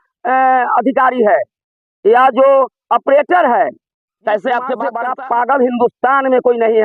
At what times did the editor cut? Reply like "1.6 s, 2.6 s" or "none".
4.9 s